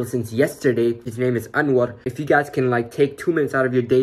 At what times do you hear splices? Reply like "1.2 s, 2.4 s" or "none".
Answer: 1.1 s, 2.1 s